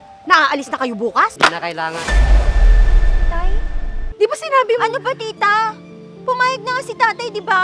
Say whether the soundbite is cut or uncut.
cut